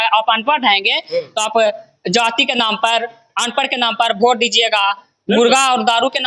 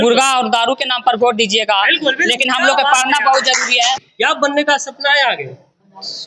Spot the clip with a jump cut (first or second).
second